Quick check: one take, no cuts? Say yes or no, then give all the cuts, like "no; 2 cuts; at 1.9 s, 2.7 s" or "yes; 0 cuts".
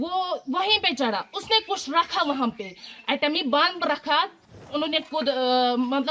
no; 1 cut; at 4.6 s